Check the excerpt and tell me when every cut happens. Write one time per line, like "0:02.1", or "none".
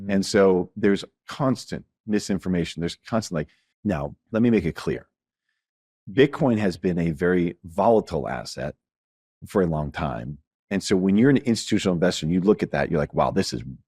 0:03.6